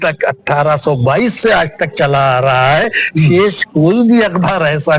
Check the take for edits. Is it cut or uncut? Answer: uncut